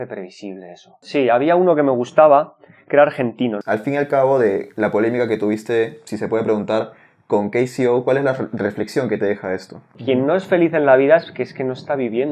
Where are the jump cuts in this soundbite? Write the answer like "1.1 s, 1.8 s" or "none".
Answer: 1.0 s, 3.6 s, 10.0 s